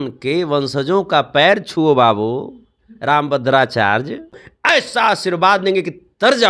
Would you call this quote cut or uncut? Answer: cut